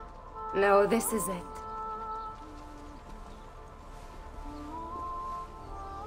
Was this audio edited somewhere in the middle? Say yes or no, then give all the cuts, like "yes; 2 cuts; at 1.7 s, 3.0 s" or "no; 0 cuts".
yes; 1 cut; at 1.3 s